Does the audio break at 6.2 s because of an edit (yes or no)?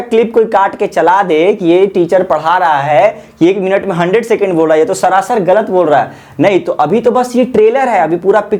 no